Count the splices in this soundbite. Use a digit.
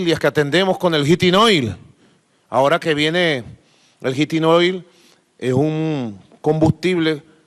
0